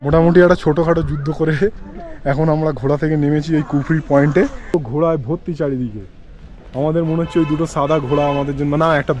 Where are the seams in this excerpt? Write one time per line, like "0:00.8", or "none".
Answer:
0:04.7